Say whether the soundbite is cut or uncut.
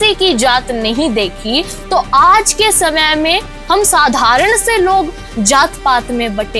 uncut